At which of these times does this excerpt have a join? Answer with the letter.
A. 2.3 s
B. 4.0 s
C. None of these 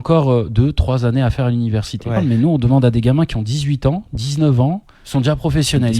A